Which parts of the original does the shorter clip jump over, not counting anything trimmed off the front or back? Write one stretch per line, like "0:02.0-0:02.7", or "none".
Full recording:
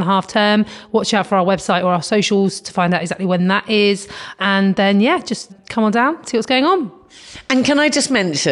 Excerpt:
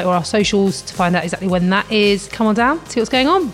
0:04.1-0:05.7